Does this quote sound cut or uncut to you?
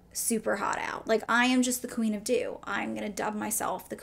uncut